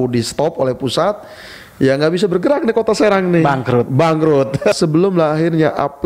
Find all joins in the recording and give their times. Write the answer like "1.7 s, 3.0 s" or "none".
4.8 s